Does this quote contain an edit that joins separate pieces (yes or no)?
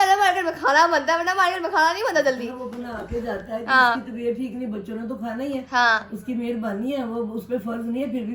no